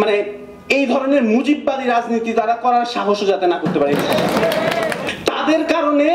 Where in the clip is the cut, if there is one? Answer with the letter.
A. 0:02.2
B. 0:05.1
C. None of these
B